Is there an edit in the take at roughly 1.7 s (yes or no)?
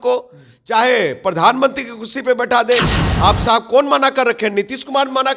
no